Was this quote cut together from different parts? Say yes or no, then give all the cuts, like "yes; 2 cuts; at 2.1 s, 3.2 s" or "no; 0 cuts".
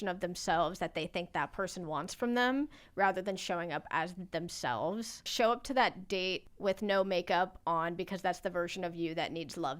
yes; 2 cuts; at 5.3 s, 6.5 s